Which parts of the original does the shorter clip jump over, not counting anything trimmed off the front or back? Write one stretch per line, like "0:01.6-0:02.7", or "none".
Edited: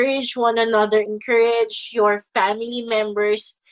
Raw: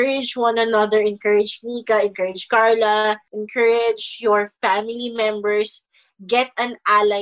0:01.0-0:03.3